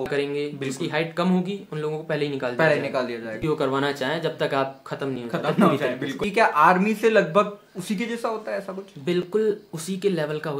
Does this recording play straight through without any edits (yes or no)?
no